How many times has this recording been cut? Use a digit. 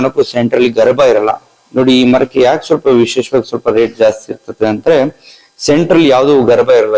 0